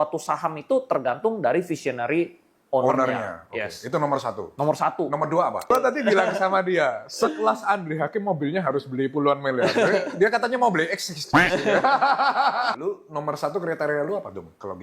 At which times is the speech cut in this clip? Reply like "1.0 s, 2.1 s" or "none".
5.7 s, 12.7 s